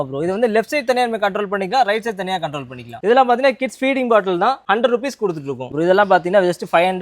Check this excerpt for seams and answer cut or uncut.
cut